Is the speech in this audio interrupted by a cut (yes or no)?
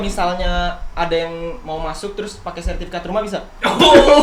no